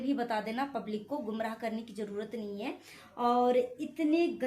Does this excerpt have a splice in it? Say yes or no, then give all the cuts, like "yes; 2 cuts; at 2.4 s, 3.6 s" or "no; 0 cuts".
no; 0 cuts